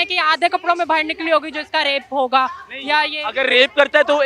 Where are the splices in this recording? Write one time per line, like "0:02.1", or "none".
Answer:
none